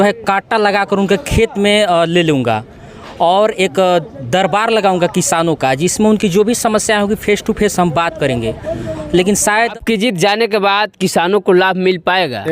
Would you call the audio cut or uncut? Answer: cut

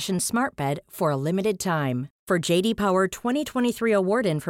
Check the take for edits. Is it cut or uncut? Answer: uncut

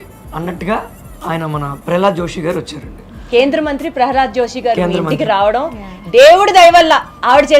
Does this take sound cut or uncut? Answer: uncut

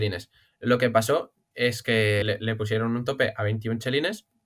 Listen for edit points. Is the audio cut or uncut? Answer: cut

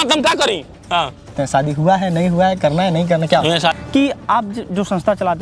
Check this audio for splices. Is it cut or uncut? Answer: cut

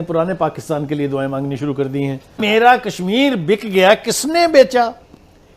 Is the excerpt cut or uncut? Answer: cut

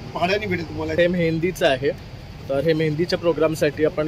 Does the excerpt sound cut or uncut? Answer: cut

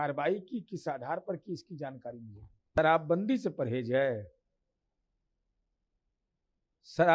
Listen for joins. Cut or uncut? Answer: cut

